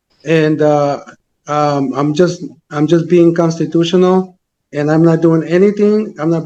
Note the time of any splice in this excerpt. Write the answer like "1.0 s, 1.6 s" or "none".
none